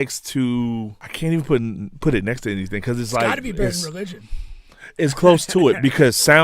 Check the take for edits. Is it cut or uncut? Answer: cut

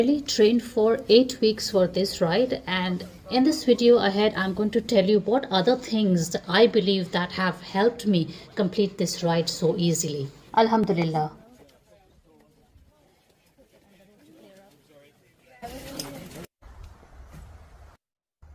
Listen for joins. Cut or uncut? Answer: uncut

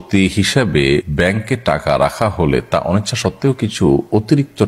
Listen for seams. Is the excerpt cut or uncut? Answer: cut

